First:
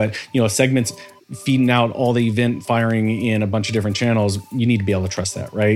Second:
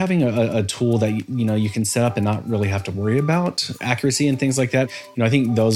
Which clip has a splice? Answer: second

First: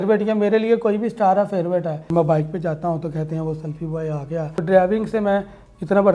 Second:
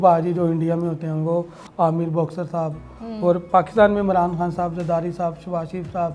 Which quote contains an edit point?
first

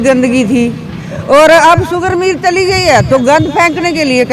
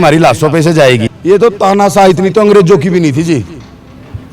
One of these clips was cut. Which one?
second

